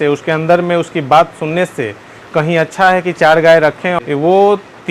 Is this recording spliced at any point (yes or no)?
yes